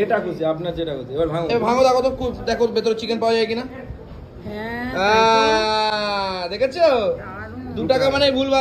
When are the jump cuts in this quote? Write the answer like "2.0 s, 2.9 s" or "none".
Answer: none